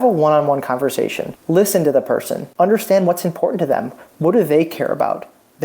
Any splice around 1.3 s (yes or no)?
yes